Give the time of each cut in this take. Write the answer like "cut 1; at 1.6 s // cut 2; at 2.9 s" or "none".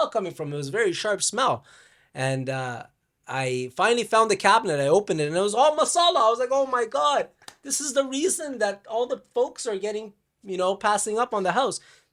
none